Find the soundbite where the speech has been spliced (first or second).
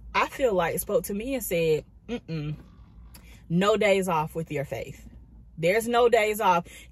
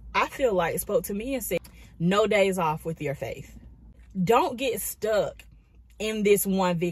second